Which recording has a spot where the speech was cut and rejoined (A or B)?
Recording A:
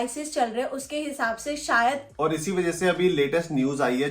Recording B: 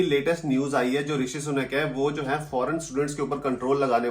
A